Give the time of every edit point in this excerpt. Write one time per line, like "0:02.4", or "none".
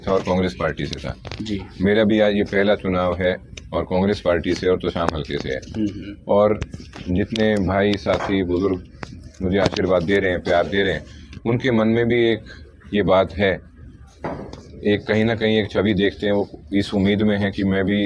none